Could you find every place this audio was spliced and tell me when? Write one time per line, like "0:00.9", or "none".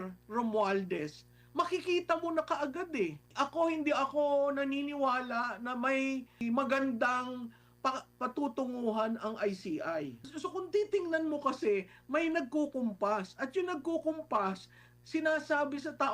0:03.3
0:06.4
0:10.2

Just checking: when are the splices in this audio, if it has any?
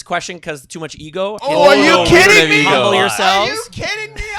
0:01.4

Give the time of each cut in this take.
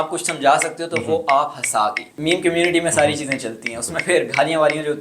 0:02.1

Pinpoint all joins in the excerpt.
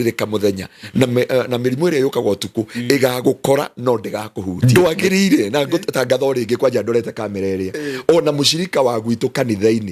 0:04.5

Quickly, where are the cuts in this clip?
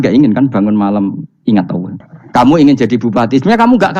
0:01.9

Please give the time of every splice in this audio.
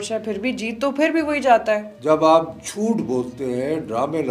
0:01.9

